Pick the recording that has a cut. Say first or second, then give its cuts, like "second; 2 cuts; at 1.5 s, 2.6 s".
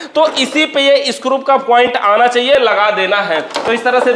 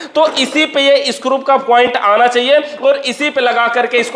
first; 1 cut; at 2.6 s